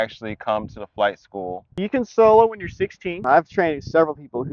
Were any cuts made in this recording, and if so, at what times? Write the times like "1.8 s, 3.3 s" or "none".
3.1 s

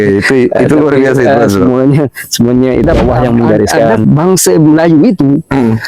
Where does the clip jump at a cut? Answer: 4.0 s

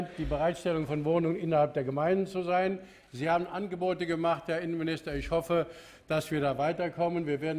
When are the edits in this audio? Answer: none

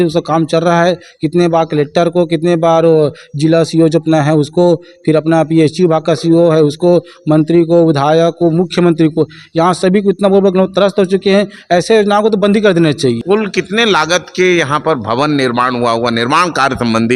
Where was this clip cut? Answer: 13.2 s

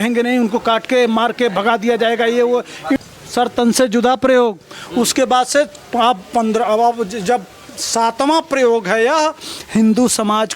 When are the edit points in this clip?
3.0 s

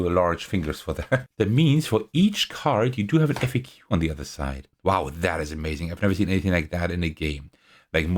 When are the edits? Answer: 1.3 s

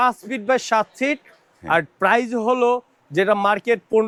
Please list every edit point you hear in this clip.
none

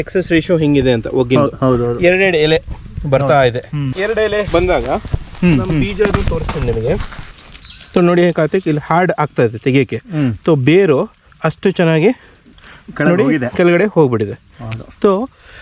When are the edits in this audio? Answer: none

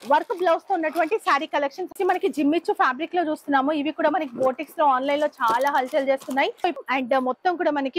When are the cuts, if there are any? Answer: 1.8 s, 6.8 s

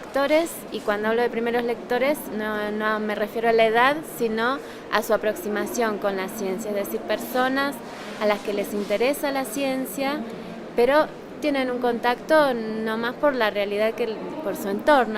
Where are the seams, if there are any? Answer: 5.2 s

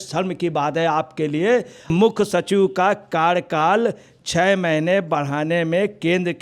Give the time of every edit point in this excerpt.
1.9 s

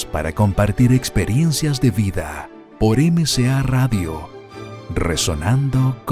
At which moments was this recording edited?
none

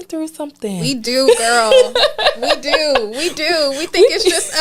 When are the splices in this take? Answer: none

